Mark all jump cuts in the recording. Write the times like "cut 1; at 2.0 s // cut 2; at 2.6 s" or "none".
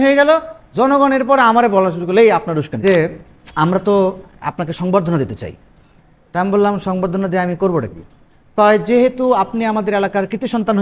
cut 1; at 2.8 s